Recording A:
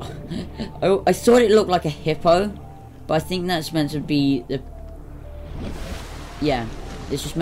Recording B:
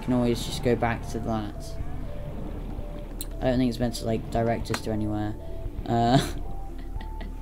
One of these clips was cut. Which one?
B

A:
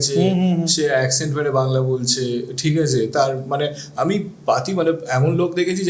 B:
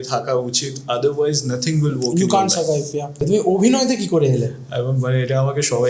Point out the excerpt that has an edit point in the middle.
B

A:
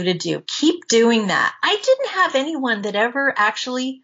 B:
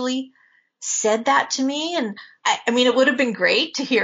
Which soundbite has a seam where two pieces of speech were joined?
B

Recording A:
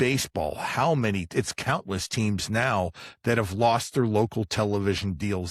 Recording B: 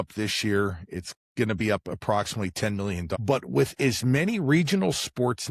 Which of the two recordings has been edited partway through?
B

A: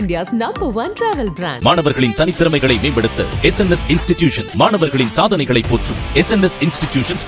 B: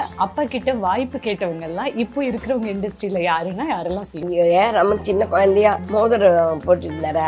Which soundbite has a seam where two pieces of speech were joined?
B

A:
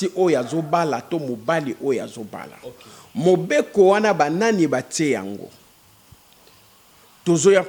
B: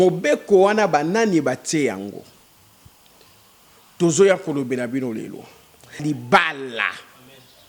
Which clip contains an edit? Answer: B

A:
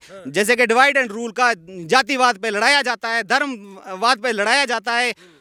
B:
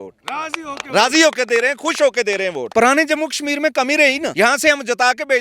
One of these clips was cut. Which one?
B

